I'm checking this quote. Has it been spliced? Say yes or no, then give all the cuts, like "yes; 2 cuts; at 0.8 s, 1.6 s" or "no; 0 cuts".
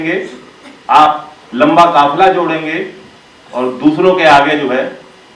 no; 0 cuts